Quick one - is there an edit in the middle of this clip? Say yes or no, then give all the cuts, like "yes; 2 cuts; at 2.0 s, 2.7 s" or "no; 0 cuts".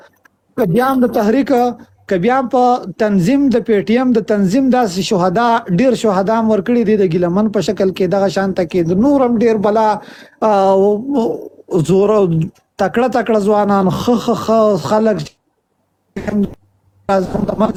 no; 0 cuts